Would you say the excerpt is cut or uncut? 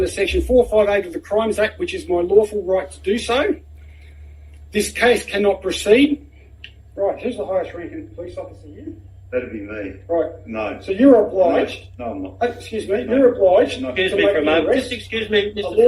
uncut